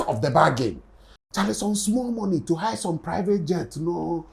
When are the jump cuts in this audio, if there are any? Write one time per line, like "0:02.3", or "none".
0:01.2